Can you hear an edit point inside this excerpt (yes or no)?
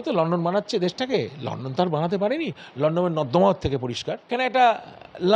yes